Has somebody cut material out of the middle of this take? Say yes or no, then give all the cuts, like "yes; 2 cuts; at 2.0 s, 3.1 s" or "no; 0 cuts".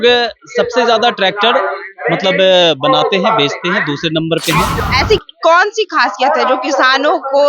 yes; 1 cut; at 4.8 s